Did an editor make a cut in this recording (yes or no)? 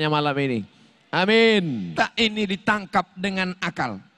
yes